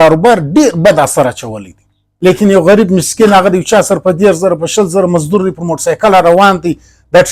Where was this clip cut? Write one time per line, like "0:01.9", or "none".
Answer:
0:02.0